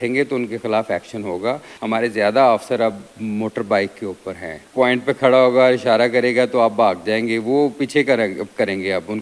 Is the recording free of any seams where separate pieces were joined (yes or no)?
no